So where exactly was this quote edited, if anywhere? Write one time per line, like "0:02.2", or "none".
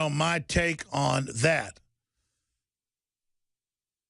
none